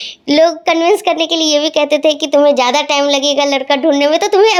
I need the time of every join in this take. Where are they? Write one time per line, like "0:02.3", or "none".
none